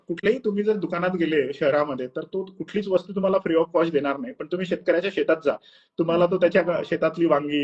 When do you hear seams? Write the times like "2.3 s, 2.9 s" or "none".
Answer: none